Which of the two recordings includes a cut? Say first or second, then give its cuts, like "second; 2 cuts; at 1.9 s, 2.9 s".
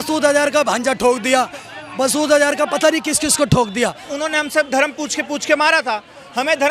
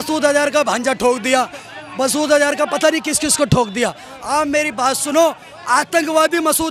first; 1 cut; at 4.1 s